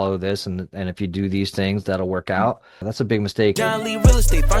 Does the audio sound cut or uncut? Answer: cut